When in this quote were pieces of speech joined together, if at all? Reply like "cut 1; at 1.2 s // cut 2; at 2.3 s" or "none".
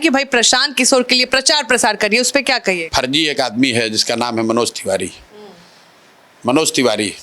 cut 1; at 2.8 s